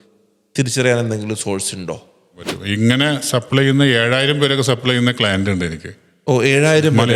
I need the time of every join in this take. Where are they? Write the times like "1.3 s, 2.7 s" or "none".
2.6 s